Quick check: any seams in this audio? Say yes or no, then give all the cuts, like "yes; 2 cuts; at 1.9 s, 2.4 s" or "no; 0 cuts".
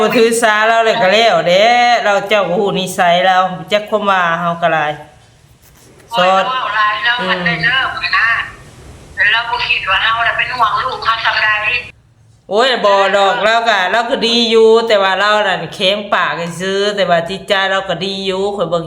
yes; 1 cut; at 11.9 s